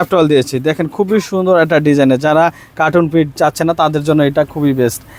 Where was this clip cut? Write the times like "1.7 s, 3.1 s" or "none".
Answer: none